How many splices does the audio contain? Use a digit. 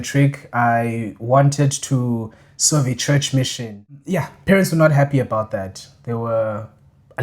1